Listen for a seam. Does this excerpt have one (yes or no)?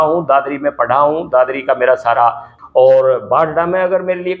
yes